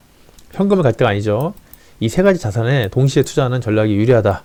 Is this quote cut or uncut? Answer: uncut